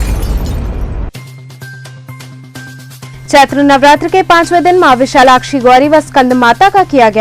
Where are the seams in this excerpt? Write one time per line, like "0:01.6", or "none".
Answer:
none